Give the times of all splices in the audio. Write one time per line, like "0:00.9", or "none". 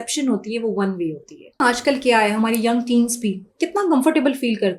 0:01.6